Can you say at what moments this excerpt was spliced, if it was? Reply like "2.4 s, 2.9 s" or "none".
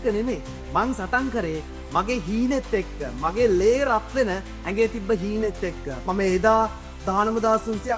none

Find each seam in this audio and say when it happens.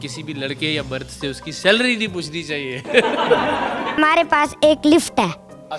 4.0 s

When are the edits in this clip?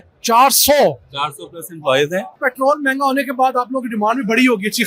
2.3 s

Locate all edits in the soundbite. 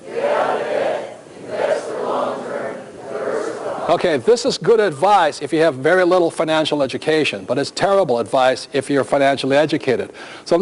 9.2 s

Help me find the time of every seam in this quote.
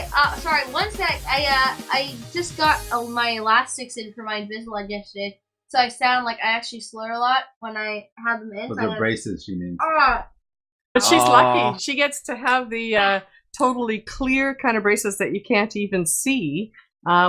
13.9 s

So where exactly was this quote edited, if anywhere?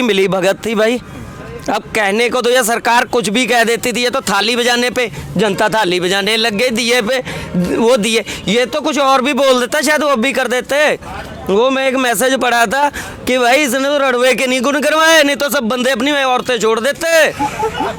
none

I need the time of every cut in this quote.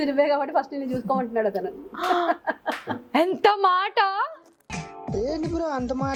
none

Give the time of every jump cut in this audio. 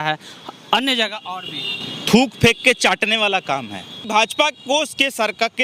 4.0 s

